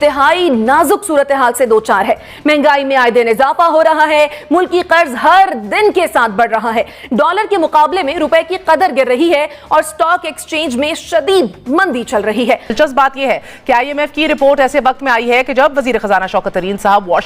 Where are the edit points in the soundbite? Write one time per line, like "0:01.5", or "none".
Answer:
0:12.7